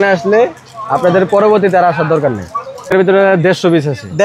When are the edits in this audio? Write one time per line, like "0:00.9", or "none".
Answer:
0:02.9